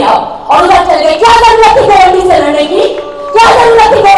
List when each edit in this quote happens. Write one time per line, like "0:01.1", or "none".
none

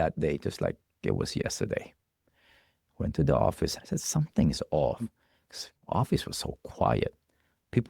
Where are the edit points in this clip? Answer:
0:01.0
0:03.8

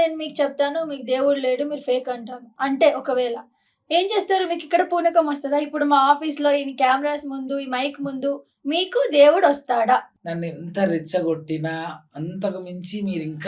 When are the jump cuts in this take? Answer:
0:02.5
0:10.2

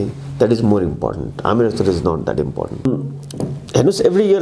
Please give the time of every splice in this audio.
0:02.7

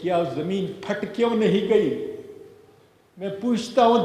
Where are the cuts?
none

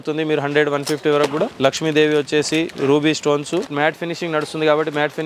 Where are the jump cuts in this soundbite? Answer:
0:01.5
0:03.7

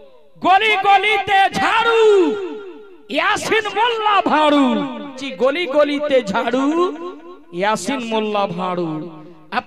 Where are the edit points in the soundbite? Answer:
0:05.2

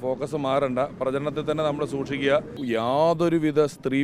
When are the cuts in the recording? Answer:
0:02.6

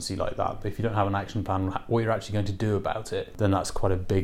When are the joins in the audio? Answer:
0:03.3

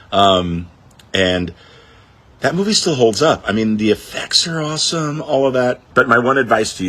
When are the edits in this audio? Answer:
0:05.8

